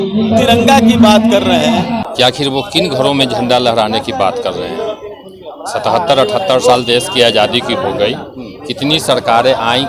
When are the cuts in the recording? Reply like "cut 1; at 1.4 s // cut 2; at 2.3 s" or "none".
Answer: cut 1; at 2.1 s